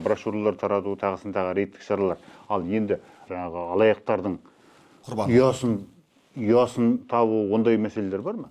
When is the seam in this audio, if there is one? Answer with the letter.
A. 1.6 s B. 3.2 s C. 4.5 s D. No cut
B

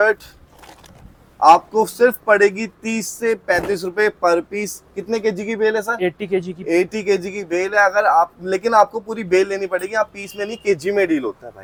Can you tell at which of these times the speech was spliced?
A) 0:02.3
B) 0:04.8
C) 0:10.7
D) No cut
D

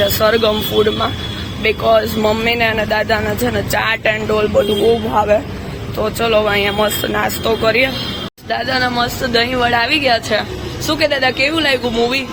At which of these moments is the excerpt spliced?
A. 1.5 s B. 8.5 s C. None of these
C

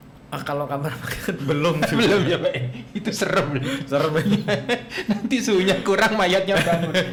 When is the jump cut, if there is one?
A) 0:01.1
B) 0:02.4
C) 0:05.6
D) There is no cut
D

